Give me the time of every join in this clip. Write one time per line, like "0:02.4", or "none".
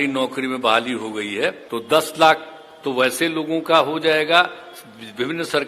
0:01.6